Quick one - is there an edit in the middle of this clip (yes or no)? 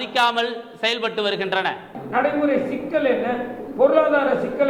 yes